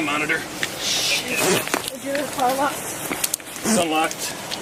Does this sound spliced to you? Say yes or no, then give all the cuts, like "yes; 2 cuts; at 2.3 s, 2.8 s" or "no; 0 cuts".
no; 0 cuts